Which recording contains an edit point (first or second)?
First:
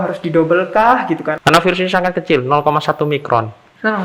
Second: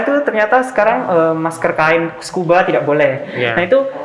first